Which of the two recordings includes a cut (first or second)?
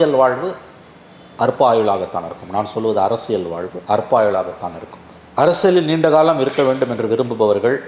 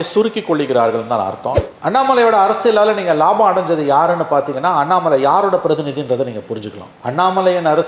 second